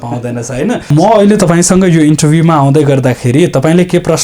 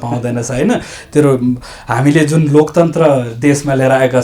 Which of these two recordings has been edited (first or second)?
first